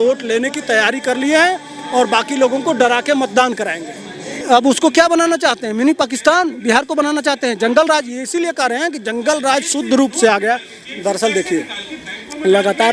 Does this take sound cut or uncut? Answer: cut